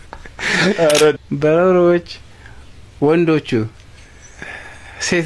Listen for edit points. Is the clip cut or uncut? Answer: cut